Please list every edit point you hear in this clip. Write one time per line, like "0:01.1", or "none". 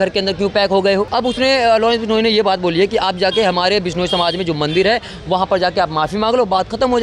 0:01.1